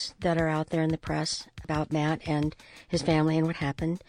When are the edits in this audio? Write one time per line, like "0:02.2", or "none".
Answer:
0:01.6